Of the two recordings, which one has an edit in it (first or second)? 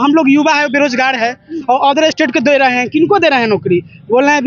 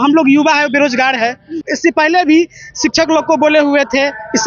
second